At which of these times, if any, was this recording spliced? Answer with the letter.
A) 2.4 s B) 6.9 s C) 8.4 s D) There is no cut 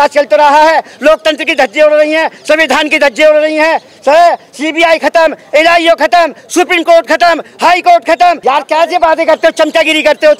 C